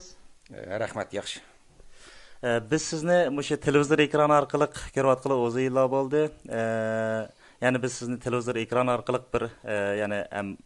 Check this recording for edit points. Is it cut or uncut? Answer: uncut